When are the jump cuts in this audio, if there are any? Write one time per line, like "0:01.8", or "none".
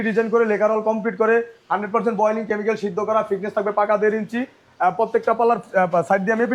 none